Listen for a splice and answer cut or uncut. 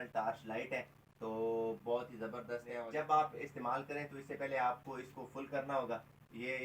cut